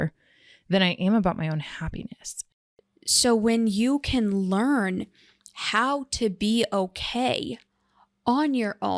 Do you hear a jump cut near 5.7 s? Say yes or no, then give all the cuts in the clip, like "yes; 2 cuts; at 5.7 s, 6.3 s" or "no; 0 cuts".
no; 1 cut; at 2.3 s